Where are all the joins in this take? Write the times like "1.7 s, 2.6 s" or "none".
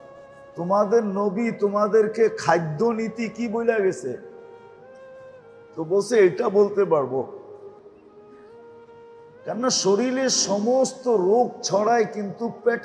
none